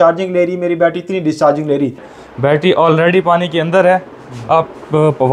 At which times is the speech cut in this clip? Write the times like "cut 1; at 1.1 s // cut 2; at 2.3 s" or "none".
cut 1; at 2.0 s